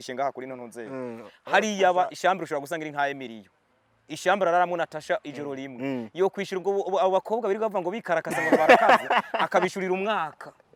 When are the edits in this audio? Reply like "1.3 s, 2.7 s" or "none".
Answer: none